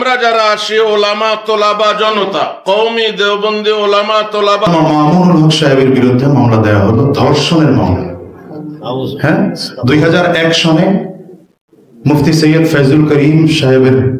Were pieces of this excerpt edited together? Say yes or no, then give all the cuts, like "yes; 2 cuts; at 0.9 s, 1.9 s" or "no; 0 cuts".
yes; 1 cut; at 4.7 s